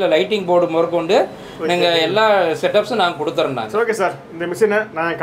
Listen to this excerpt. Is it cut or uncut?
cut